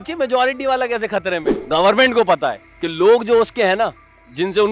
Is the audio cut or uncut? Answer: cut